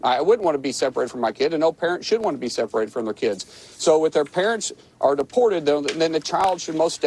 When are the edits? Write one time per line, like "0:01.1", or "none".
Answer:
none